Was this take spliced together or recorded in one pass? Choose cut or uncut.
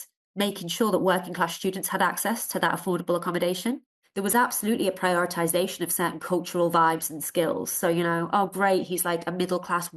cut